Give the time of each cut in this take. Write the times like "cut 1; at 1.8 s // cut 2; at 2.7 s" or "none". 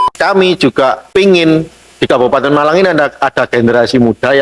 cut 1; at 1.0 s

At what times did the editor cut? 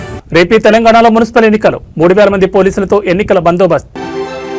none

